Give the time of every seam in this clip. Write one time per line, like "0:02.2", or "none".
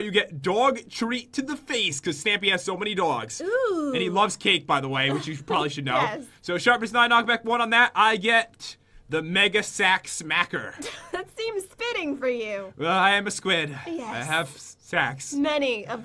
0:13.9